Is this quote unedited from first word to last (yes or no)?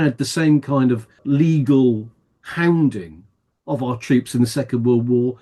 no